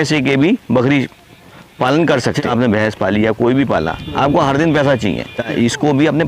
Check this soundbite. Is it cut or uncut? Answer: cut